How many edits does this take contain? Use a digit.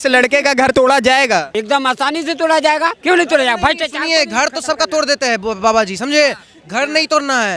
3